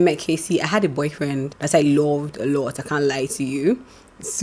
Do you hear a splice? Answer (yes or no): yes